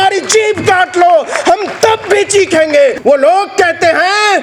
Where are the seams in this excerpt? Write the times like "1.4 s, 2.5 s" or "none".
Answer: 3.0 s